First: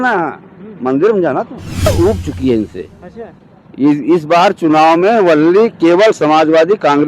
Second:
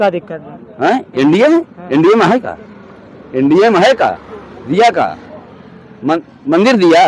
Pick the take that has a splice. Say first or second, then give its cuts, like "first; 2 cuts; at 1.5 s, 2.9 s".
first; 1 cut; at 1.9 s